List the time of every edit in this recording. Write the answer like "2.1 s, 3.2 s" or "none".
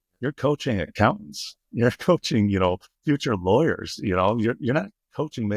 none